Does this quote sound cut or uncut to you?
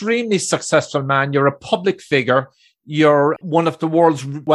cut